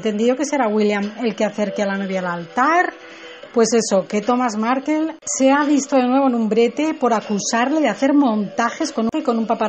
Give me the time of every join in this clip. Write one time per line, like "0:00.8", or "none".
0:02.4